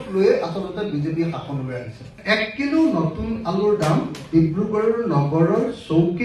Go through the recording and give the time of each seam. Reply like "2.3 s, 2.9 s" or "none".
2.1 s